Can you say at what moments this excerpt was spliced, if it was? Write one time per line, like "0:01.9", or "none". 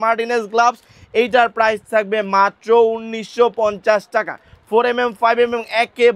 none